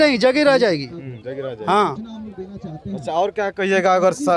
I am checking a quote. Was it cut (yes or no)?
no